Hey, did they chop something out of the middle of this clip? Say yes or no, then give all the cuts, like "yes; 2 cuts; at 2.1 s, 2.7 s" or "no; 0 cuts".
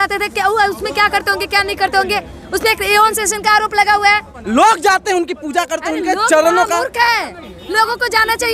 yes; 1 cut; at 4.3 s